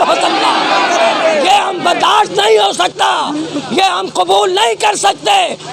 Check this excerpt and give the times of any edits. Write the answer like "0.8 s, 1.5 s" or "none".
none